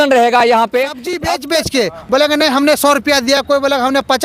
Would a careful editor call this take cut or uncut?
cut